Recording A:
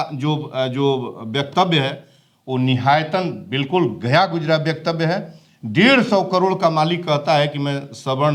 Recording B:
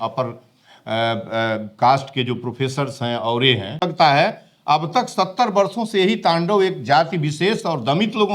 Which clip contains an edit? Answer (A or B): B